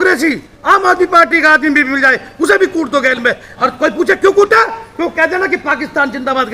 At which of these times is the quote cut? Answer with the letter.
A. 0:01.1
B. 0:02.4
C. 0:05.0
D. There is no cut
D